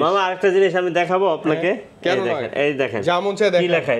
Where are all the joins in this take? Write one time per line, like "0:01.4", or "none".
none

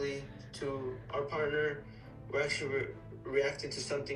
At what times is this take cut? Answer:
none

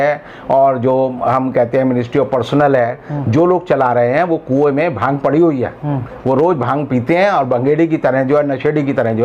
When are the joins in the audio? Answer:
none

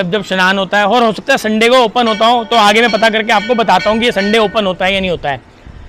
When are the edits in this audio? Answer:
none

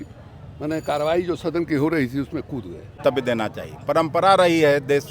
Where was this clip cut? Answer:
0:03.0

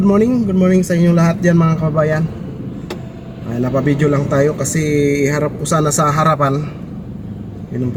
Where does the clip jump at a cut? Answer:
none

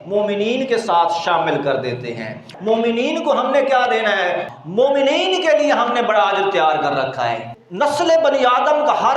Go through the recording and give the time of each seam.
0:02.5
0:04.5
0:07.5

